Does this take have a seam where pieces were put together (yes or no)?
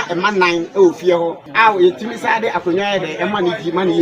yes